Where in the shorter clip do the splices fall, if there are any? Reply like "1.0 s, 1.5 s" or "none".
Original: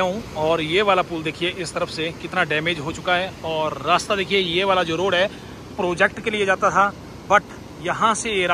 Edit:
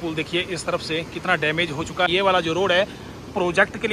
2.1 s